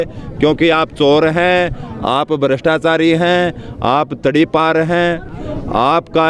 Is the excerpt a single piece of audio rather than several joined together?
yes; 0 cuts

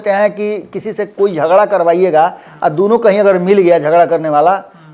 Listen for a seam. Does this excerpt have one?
no; 0 cuts

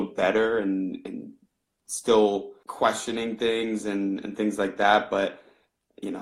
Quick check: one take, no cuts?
no; 1 cut; at 2.6 s

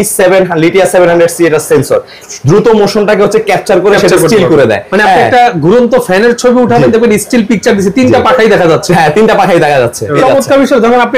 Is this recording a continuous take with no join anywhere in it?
no; 2 cuts; at 2.2 s, 10.2 s

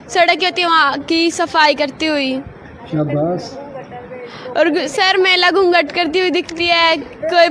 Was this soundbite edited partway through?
no; 0 cuts

